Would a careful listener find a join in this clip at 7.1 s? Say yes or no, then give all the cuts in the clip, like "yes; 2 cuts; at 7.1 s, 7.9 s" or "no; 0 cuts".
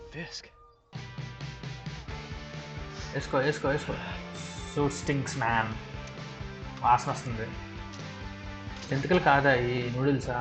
no; 1 cut; at 0.9 s